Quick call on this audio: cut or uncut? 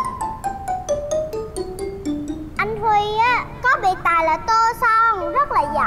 cut